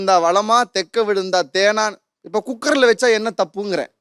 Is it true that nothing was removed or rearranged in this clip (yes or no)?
yes